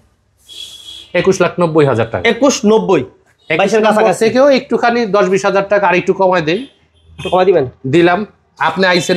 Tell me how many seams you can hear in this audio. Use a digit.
0